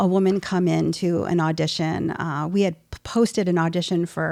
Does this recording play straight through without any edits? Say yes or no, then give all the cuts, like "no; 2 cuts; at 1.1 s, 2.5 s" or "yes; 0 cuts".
yes; 0 cuts